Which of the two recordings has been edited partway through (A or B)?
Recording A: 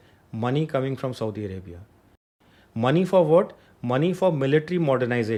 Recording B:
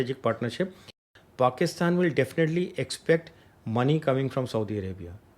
B